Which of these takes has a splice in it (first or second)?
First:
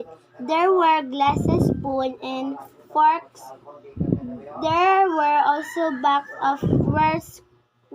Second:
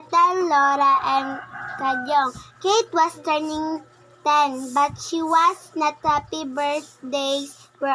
first